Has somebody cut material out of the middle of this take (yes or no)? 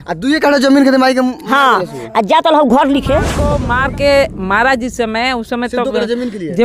yes